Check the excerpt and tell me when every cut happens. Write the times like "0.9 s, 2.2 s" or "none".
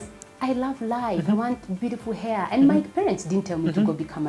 none